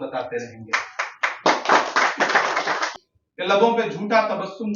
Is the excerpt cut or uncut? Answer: cut